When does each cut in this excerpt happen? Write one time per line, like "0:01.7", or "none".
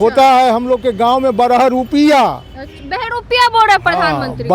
none